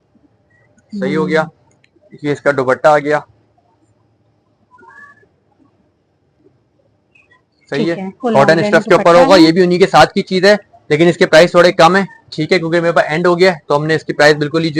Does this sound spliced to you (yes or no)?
no